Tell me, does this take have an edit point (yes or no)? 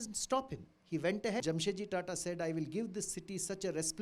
yes